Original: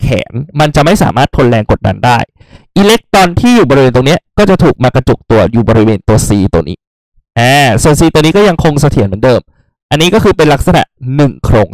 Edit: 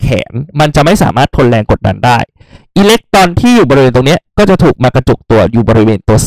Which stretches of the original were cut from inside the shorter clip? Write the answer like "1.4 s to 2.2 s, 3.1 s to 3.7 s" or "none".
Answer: none